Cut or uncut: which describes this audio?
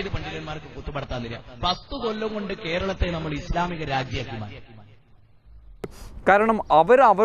cut